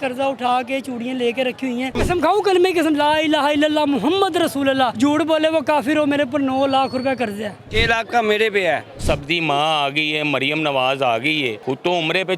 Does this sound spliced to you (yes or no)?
yes